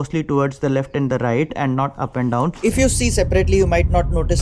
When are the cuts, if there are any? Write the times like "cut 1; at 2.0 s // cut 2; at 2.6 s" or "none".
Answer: cut 1; at 2.6 s